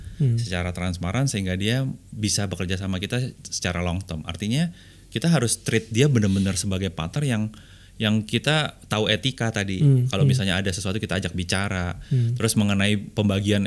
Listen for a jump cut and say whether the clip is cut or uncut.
uncut